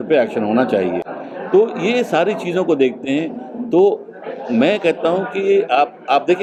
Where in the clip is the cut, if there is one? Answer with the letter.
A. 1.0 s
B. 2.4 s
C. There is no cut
C